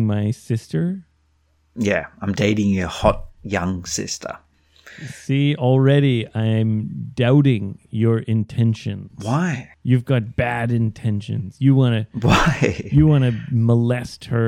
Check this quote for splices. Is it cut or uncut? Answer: uncut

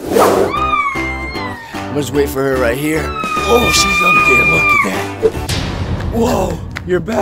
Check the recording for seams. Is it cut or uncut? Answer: uncut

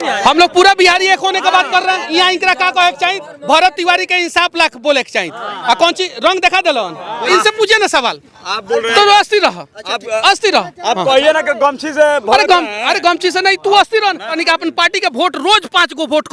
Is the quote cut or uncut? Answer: cut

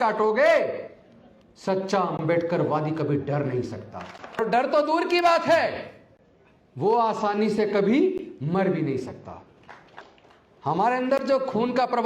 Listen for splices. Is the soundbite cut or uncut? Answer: cut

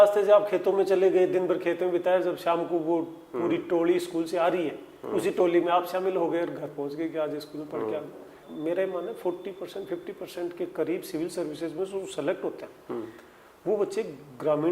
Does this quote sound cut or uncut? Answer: cut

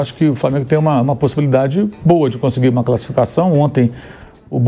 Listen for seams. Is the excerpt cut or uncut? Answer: uncut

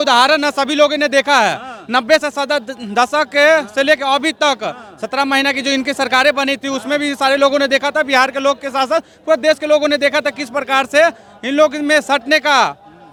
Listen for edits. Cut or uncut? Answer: uncut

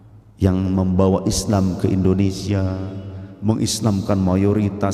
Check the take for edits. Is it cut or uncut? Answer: uncut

